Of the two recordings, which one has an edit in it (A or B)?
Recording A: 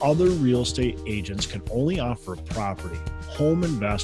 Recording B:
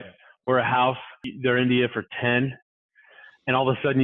B